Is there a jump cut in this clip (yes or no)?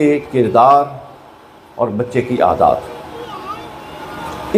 no